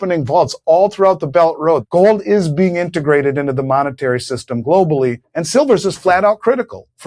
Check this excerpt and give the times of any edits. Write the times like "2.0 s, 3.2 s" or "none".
1.9 s